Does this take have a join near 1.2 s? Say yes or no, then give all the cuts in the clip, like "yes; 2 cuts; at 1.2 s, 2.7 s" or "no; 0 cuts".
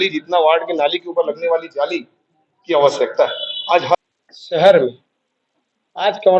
no; 1 cut; at 3.9 s